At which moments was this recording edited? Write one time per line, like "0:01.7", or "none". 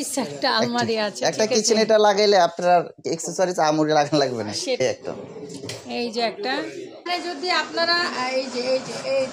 0:04.8
0:07.1